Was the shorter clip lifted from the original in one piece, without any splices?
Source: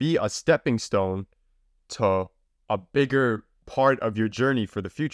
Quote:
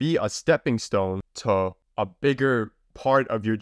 no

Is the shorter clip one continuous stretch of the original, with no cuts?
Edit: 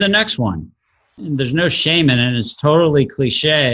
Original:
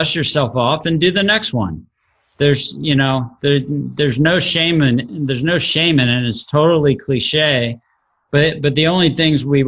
no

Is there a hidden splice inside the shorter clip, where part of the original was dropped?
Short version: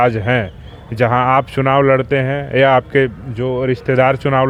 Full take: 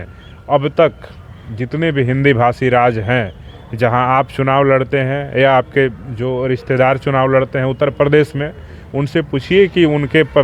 no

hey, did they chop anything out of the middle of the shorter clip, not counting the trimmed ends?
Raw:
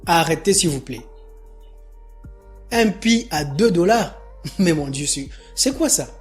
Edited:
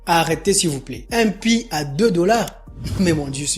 yes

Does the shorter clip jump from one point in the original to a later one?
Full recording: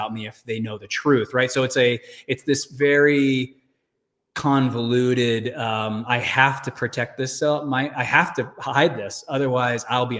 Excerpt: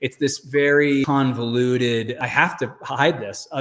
yes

